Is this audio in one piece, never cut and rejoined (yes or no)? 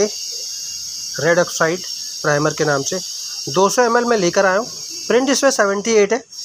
yes